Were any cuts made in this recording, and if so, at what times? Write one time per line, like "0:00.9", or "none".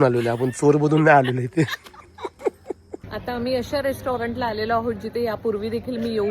0:03.1